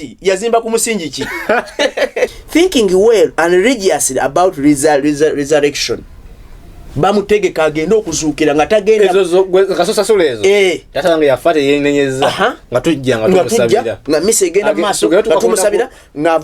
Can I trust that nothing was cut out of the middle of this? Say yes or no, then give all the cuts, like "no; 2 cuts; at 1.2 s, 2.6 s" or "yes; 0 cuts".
no; 1 cut; at 2.4 s